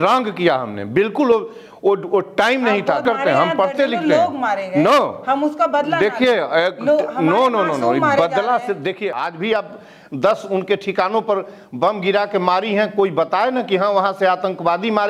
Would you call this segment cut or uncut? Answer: cut